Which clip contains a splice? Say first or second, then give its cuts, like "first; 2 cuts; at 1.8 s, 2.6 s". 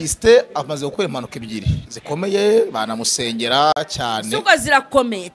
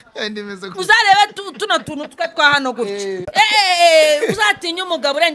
second; 1 cut; at 3.2 s